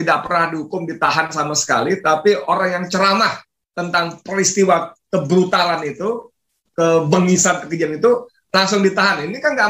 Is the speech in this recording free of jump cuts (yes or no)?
yes